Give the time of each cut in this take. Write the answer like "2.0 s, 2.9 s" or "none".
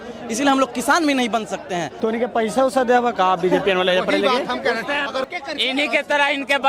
1.9 s, 5.3 s